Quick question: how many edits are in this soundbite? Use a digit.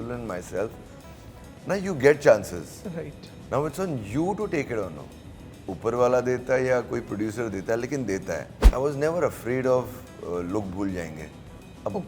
1